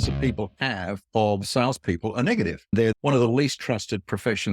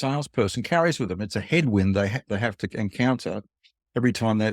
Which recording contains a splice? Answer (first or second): first